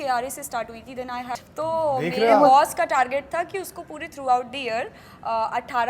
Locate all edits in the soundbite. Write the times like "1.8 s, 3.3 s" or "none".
1.4 s